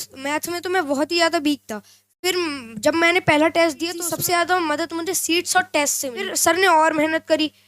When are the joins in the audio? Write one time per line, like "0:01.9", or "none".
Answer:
0:04.1
0:06.3